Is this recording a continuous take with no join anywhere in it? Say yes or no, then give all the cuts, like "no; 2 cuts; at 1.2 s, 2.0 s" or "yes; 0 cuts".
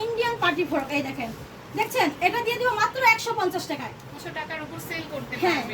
no; 1 cut; at 4.2 s